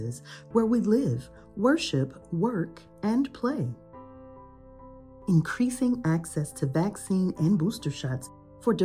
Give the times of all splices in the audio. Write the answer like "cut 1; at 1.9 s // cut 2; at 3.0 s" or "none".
cut 1; at 3.8 s // cut 2; at 5.2 s